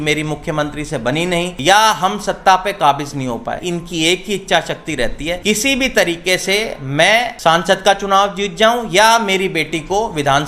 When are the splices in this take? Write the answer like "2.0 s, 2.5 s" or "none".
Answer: 1.5 s, 3.6 s, 5.4 s, 7.3 s